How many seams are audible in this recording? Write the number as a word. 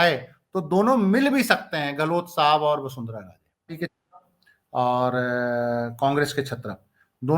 one